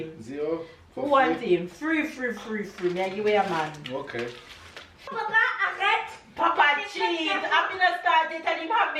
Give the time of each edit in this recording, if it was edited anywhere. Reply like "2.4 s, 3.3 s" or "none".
5.0 s